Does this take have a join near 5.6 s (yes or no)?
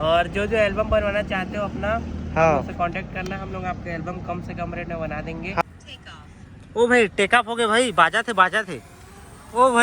yes